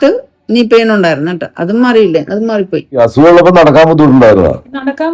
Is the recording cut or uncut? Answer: cut